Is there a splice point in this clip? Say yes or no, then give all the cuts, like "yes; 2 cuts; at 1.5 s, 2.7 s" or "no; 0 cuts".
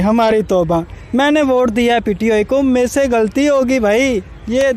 no; 0 cuts